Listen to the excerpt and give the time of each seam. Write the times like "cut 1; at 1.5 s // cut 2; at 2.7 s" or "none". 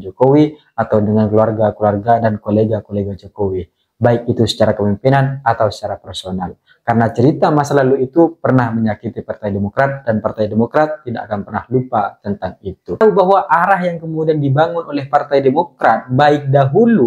cut 1; at 13.0 s